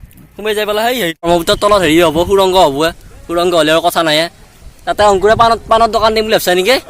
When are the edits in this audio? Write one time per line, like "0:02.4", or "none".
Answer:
0:01.3